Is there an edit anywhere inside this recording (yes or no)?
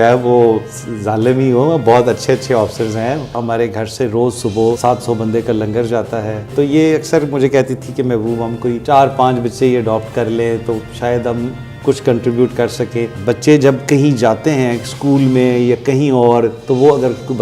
yes